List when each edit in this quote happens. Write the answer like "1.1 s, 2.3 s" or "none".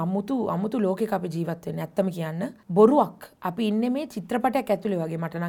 2.6 s